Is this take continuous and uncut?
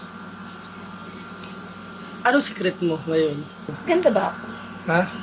no; 1 cut; at 3.8 s

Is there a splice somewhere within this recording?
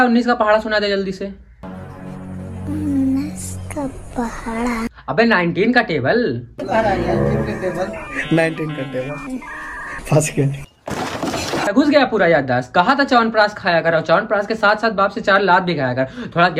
yes; 1 cut; at 11.7 s

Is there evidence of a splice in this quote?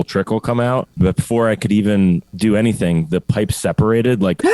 yes; 2 cuts; at 0.9 s, 2.3 s

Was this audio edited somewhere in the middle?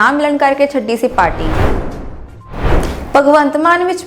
yes; 2 cuts; at 1.4 s, 3.1 s

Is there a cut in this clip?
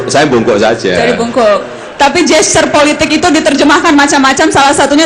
yes; 1 cut; at 2.0 s

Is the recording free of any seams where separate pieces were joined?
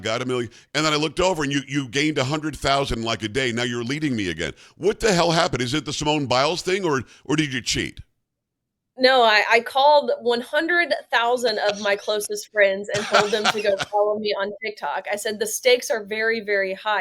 yes; 0 cuts

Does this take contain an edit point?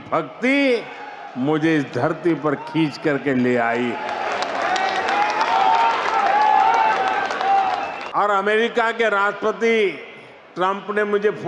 yes; 1 cut; at 8.0 s

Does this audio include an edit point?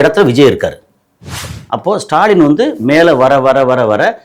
yes; 1 cut; at 1.5 s

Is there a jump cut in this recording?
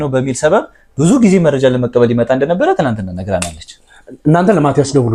no; 0 cuts

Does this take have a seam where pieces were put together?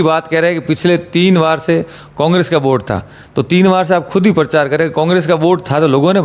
no; 0 cuts

